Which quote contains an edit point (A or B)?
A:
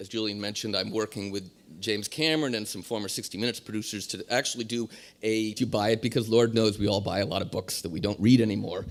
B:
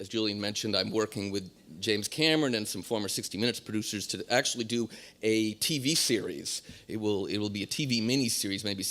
B